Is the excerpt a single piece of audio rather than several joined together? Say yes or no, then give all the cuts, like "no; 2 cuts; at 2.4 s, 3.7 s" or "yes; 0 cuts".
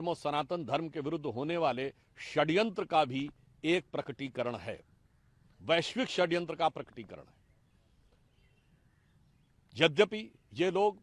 yes; 0 cuts